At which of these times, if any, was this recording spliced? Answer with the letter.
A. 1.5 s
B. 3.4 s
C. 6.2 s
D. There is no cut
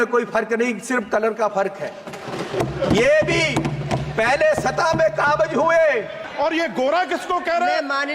C